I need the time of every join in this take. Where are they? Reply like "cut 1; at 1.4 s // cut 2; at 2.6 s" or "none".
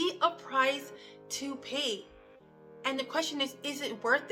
none